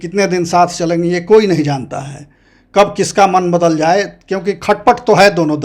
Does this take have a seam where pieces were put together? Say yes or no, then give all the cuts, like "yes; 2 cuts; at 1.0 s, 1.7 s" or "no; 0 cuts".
no; 0 cuts